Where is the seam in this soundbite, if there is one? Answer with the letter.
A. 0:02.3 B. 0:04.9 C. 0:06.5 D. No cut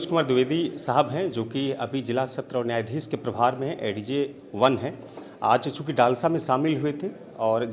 D